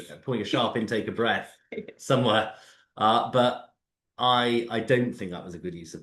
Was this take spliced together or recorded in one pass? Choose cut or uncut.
uncut